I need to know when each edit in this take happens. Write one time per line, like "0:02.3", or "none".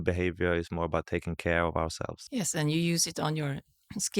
0:02.2